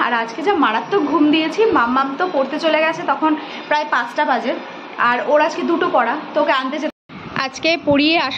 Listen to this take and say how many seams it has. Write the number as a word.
one